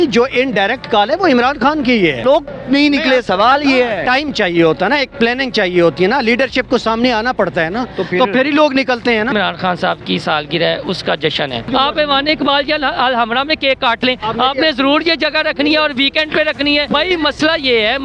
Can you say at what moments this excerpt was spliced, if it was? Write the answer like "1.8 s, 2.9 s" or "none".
2.2 s, 9.3 s, 11.7 s, 16.9 s